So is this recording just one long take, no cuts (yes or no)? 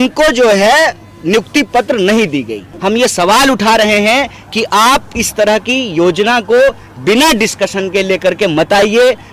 no